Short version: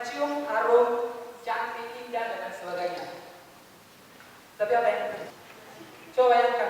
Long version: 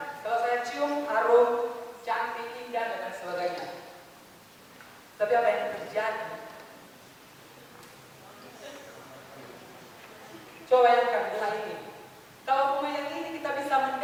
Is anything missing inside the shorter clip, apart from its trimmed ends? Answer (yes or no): yes